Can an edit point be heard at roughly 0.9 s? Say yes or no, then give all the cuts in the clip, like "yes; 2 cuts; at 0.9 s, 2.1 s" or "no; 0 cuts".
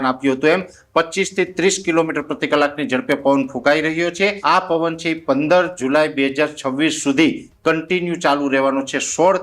no; 1 cut; at 4.4 s